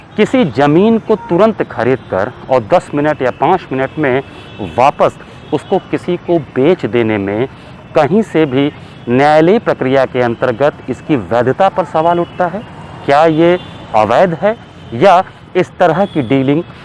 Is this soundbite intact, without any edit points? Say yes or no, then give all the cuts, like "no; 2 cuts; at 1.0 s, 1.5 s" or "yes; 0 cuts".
yes; 0 cuts